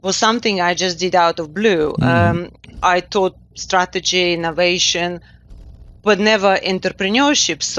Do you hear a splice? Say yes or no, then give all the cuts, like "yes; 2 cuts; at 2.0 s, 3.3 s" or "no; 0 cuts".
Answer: no; 0 cuts